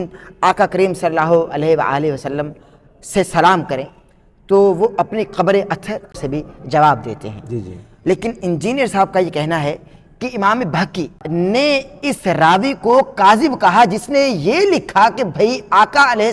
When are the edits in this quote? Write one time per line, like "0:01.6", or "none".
0:06.1
0:11.2

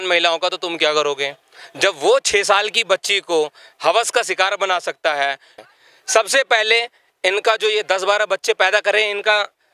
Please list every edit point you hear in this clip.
0:05.6

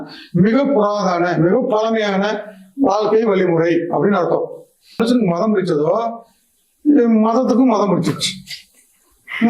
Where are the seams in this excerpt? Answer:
0:05.0

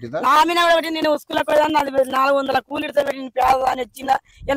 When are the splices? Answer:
none

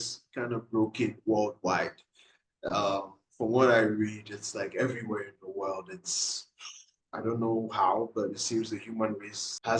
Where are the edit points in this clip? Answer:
none

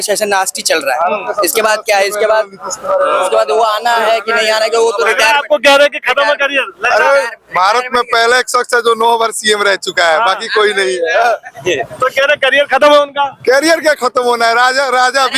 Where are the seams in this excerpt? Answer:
none

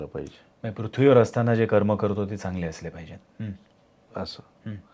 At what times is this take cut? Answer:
none

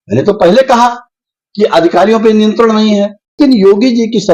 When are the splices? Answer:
0:03.4

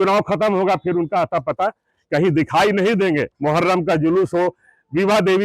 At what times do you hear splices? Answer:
0:03.3

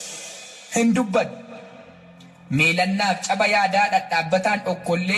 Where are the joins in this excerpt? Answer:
none

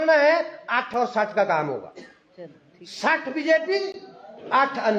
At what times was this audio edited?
none

